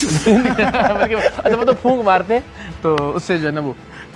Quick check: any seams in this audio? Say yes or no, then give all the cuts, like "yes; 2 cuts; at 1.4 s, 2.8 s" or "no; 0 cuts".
no; 0 cuts